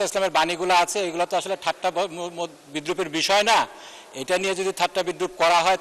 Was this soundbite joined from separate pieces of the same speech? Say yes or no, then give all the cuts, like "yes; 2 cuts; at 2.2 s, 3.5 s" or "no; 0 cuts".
no; 0 cuts